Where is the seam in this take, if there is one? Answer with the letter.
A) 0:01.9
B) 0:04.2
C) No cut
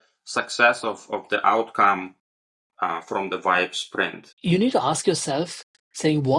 B